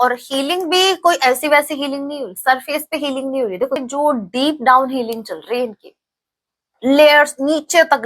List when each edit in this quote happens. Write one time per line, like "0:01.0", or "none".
0:03.8

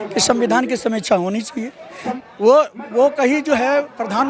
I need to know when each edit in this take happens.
0:02.1

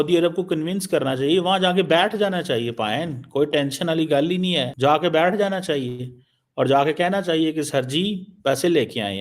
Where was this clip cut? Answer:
0:04.7

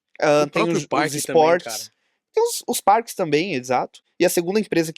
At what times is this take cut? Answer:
0:04.0

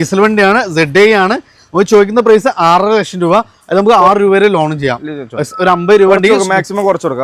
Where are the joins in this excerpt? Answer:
none

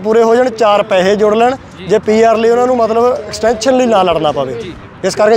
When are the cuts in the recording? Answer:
none

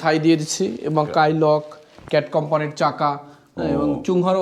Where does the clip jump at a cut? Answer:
none

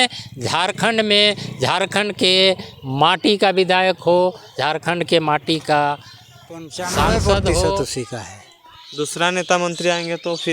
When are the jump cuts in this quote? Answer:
0:07.8

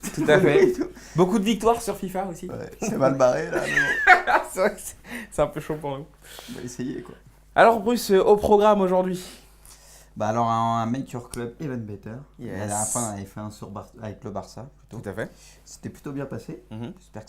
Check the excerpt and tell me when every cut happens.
0:03.2

